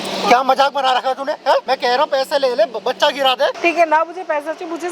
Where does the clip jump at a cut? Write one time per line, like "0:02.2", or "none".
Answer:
0:01.6
0:03.6